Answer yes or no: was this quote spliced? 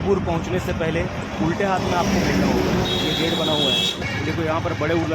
yes